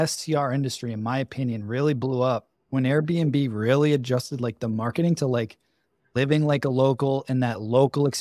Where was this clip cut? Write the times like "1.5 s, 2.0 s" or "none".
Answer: 2.6 s